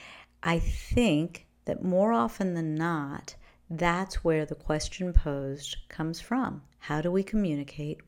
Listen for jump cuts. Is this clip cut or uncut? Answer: cut